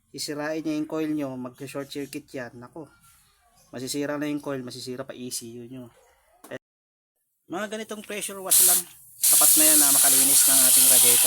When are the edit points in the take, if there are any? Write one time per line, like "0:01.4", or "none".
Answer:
0:06.6